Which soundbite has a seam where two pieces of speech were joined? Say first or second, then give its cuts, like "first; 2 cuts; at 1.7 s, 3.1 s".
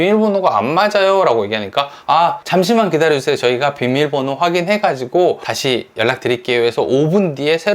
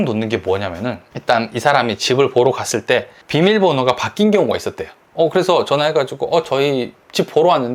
first; 2 cuts; at 2.4 s, 5.5 s